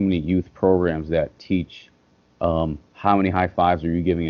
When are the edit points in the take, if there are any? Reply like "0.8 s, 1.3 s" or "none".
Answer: none

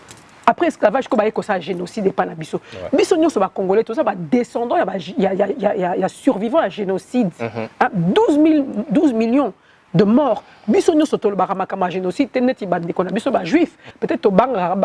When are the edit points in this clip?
13.8 s

